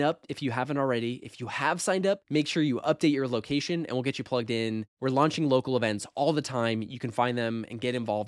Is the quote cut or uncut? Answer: uncut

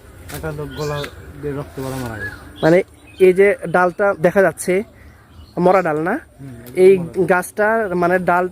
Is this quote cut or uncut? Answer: cut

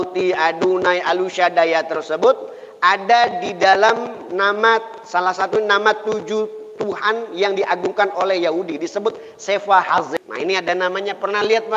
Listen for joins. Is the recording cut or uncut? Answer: cut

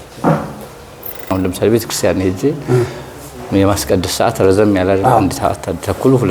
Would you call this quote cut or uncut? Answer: cut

